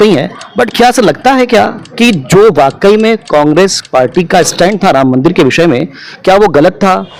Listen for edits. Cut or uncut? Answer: uncut